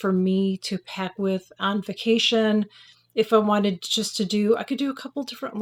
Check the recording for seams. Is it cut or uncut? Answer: uncut